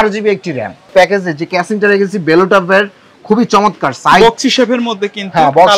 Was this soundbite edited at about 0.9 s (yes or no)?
yes